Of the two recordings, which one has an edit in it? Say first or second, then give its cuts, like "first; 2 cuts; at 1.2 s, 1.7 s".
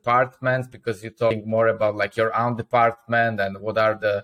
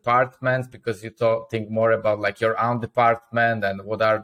first; 1 cut; at 1.3 s